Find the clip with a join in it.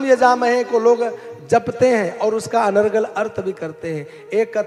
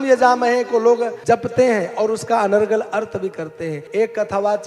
second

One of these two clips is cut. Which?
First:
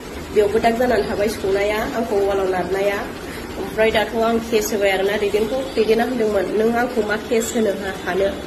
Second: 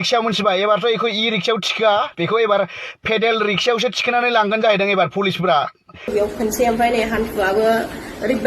second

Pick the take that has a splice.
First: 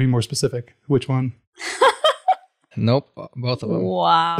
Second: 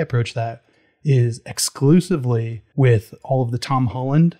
second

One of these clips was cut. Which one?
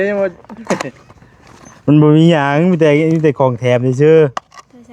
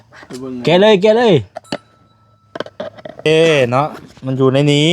second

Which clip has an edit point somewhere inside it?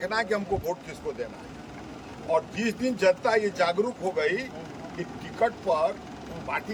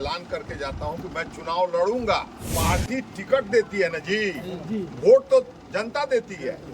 second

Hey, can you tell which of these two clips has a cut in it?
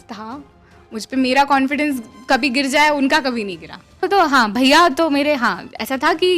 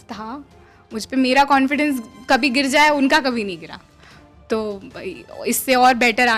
first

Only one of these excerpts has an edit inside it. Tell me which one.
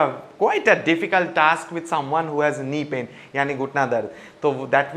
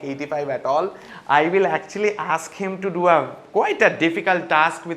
second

